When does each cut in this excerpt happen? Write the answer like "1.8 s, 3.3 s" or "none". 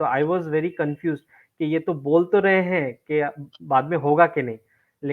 none